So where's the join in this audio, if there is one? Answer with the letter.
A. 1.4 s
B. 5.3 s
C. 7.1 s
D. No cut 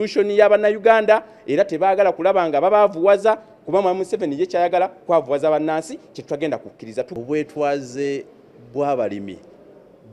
C